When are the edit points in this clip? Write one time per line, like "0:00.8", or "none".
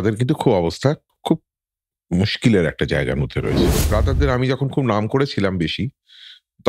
0:03.7